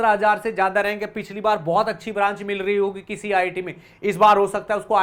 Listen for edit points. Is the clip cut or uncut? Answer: uncut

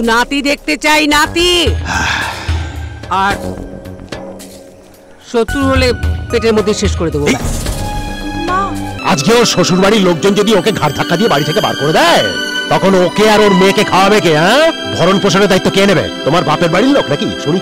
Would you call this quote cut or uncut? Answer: cut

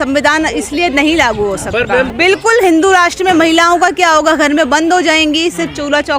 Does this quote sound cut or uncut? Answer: cut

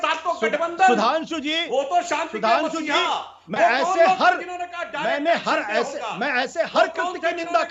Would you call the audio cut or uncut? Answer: uncut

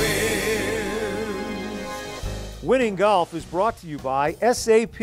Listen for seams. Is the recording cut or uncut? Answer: cut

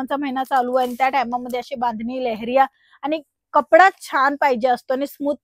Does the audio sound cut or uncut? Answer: uncut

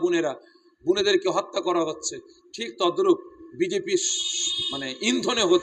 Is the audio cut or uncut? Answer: uncut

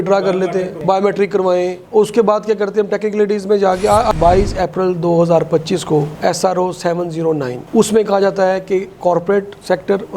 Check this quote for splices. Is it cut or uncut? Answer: cut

